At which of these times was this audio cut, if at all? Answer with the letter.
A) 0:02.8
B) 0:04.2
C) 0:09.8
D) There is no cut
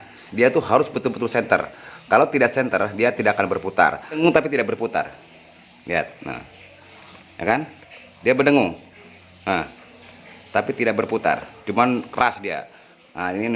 B